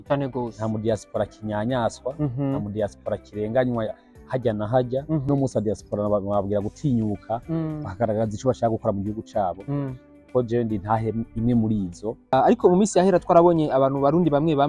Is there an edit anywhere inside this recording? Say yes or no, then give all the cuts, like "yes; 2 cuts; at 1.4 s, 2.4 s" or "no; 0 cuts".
yes; 2 cuts; at 5.3 s, 12.3 s